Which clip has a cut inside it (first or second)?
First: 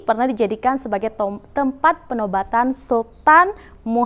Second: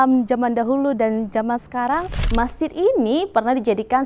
second